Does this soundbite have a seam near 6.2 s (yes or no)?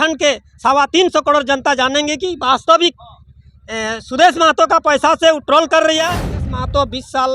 yes